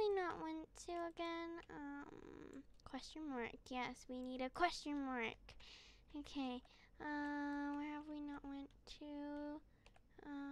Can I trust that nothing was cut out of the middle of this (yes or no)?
yes